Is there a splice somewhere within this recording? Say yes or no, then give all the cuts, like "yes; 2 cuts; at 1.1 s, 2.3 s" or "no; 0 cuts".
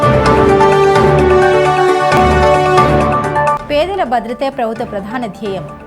yes; 1 cut; at 1.4 s